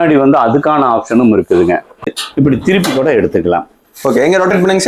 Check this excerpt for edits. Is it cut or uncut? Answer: cut